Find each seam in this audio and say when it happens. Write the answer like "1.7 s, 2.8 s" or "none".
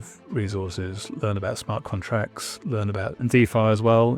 1.2 s, 3.3 s